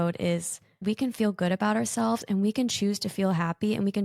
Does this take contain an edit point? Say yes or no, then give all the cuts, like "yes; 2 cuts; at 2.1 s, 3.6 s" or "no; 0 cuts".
no; 0 cuts